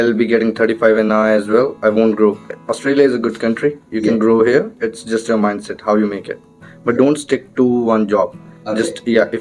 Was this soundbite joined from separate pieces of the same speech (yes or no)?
yes